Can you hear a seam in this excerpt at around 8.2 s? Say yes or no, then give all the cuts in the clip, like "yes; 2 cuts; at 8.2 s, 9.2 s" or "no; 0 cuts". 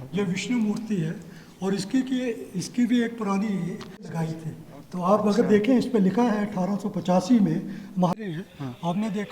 yes; 2 cuts; at 4.1 s, 8.2 s